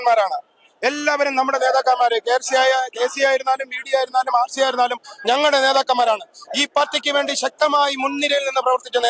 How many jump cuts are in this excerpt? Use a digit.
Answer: 0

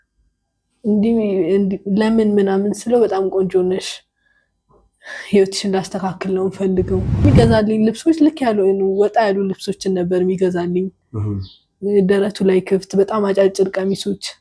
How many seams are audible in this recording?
1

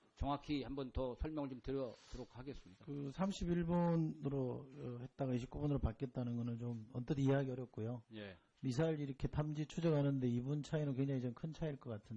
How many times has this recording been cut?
1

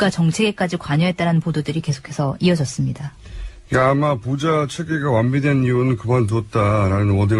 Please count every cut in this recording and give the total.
1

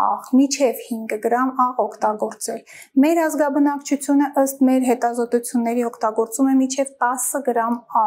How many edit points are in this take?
0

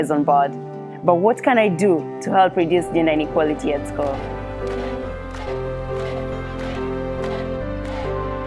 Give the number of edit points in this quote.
1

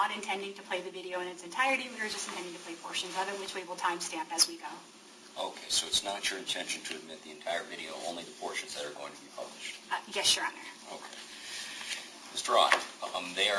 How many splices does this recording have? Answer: 0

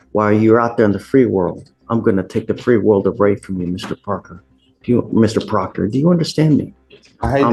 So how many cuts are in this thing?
0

